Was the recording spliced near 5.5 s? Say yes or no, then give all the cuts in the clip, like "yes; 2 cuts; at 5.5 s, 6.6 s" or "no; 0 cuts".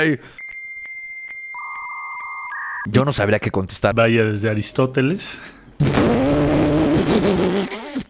no; 1 cut; at 3.9 s